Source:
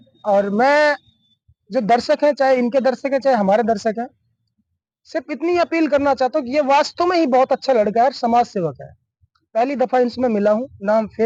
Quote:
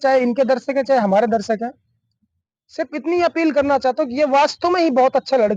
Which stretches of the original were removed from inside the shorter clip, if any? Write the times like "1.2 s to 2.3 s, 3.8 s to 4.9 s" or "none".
none